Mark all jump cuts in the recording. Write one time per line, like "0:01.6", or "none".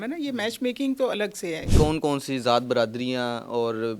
0:01.7